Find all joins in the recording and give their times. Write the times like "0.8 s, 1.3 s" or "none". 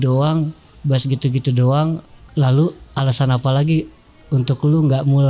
2.2 s